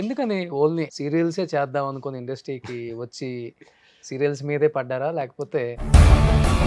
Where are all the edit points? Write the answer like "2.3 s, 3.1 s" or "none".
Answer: 0.9 s, 5.8 s